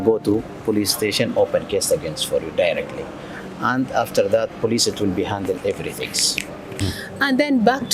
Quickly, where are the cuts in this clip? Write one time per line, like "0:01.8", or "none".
0:06.9